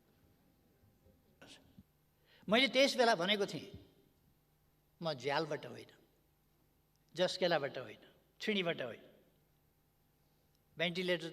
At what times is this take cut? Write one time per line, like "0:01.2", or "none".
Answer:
0:01.6